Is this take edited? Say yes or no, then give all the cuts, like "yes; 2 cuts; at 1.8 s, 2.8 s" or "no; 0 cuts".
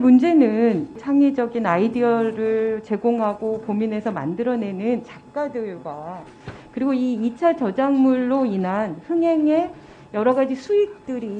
yes; 1 cut; at 0.9 s